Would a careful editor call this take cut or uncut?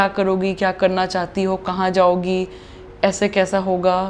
uncut